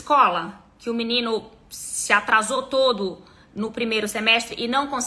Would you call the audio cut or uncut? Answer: uncut